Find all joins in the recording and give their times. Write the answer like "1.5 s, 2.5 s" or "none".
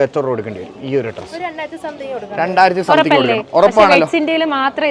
none